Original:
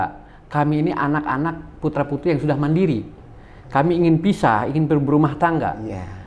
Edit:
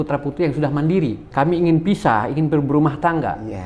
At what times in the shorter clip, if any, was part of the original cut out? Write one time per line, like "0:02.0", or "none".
0:01.2